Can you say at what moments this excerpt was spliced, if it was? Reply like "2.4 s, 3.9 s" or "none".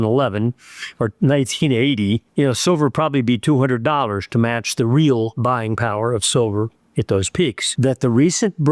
7.7 s